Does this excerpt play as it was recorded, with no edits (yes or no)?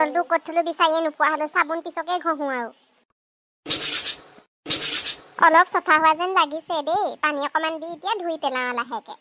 yes